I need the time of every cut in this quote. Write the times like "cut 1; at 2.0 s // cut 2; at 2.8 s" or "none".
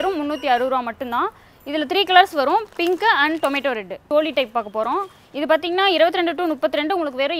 none